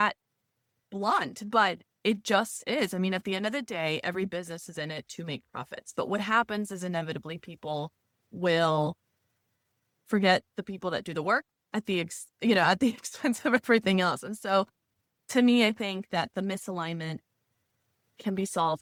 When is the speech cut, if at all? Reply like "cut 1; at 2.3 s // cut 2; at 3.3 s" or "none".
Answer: none